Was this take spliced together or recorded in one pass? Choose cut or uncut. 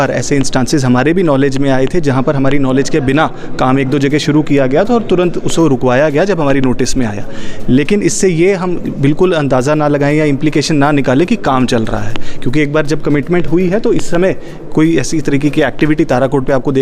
uncut